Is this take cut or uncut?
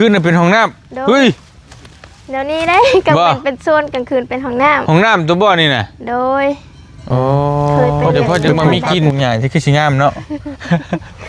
cut